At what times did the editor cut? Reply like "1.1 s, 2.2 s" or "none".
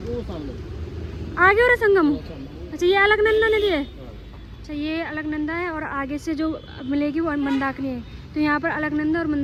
none